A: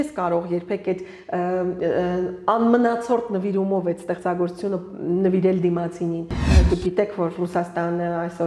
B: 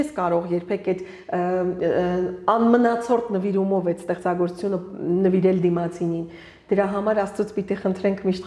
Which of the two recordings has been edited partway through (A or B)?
A